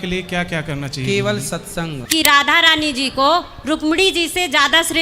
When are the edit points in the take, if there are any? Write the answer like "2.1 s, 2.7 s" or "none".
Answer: 2.0 s

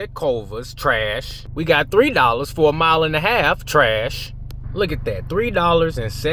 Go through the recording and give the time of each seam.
none

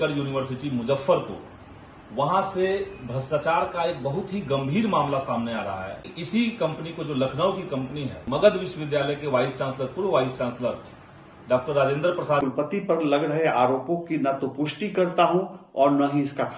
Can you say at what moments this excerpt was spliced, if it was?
6.1 s, 8.2 s, 12.7 s

